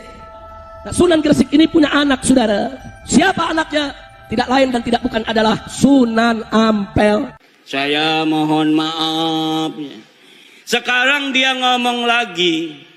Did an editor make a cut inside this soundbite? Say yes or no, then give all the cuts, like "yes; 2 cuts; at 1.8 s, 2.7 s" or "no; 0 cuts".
no; 0 cuts